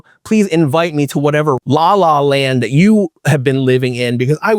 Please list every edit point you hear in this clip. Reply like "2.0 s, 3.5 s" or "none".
1.6 s